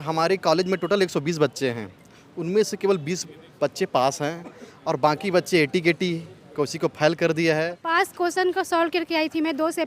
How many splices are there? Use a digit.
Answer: 1